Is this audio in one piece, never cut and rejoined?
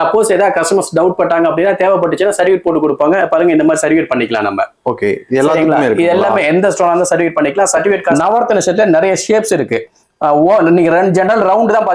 no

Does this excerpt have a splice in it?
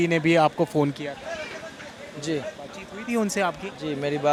no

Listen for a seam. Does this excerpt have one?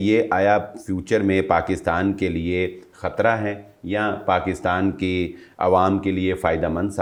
no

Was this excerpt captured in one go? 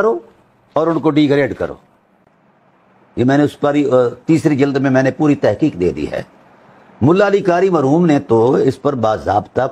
yes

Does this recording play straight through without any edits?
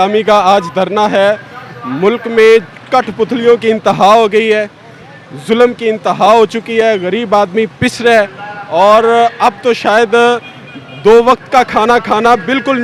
yes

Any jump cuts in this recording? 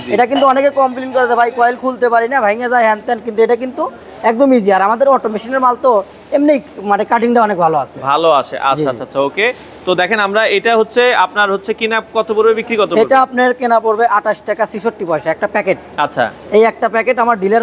no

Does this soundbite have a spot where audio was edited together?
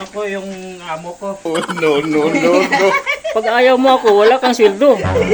no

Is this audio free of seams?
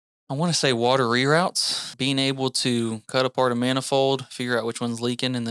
yes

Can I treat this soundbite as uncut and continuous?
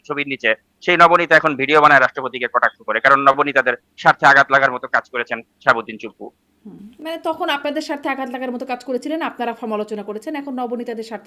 yes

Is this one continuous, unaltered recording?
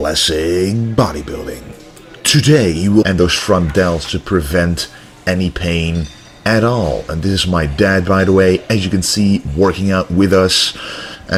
yes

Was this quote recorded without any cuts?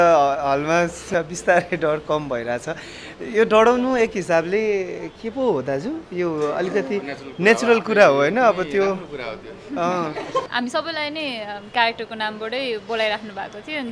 no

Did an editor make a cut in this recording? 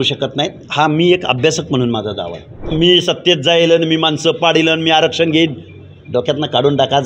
yes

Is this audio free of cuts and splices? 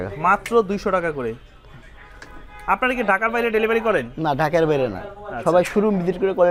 yes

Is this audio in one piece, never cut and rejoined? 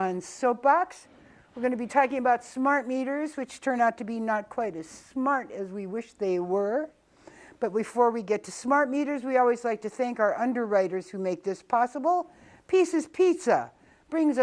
yes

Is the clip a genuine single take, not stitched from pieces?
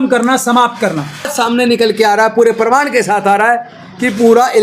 no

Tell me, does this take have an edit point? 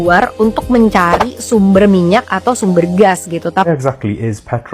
yes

